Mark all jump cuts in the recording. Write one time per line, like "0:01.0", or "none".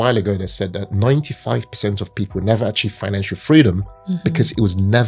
none